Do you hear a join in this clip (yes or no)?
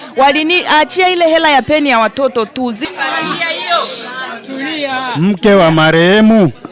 yes